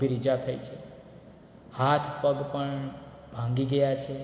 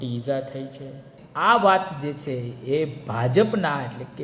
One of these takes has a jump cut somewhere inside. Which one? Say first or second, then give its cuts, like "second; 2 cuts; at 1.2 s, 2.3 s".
second; 1 cut; at 1.2 s